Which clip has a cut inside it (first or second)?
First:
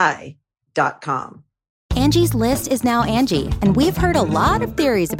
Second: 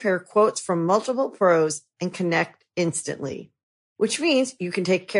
first